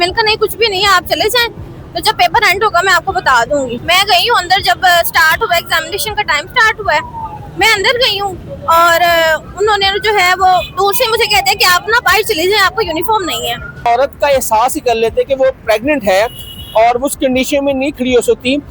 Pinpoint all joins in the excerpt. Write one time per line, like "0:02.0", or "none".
0:03.8
0:13.9